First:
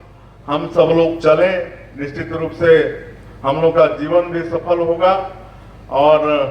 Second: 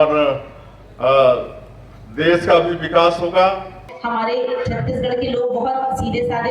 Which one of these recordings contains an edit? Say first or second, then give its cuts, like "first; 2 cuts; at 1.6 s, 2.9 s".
second; 1 cut; at 3.8 s